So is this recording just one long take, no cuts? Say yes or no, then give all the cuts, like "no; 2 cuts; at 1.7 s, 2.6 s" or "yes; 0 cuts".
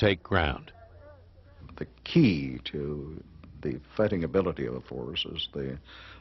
no; 1 cut; at 2.2 s